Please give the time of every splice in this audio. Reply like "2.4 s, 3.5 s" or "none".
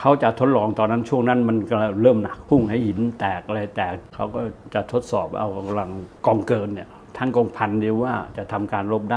2.3 s, 4.1 s, 6.0 s